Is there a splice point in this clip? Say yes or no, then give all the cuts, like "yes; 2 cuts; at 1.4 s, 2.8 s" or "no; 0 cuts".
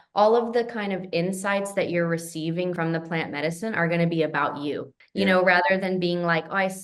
yes; 2 cuts; at 2.8 s, 5.0 s